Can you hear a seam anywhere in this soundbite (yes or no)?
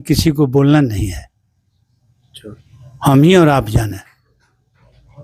no